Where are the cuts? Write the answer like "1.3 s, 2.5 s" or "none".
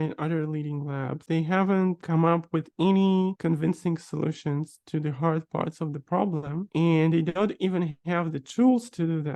1.3 s

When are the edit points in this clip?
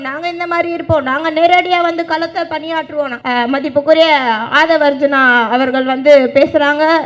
3.2 s

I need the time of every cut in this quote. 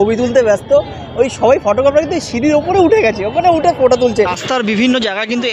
4.4 s

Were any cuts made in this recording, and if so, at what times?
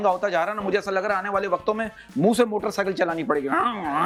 none

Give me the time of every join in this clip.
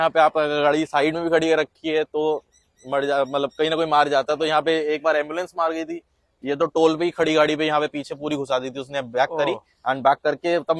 none

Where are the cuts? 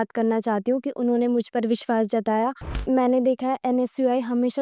2.8 s

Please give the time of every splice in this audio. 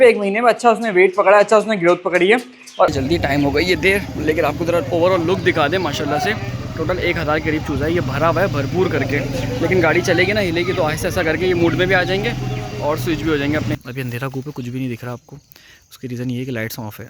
2.9 s, 13.8 s

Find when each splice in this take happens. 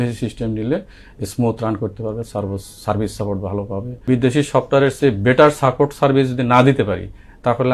4.0 s

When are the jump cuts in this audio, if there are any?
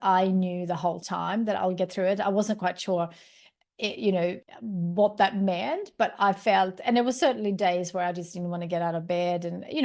4.4 s

